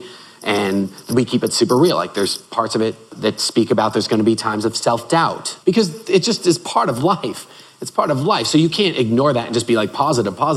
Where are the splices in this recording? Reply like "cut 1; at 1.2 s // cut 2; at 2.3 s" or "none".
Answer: cut 1; at 1.1 s // cut 2; at 3.1 s // cut 3; at 5.5 s